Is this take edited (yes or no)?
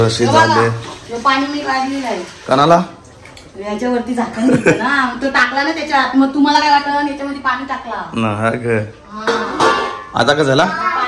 no